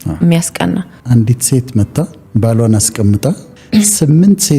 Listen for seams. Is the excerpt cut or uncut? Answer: cut